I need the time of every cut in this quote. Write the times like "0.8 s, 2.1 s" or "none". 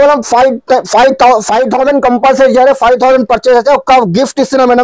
none